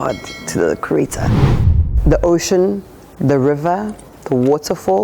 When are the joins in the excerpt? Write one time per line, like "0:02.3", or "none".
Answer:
0:01.6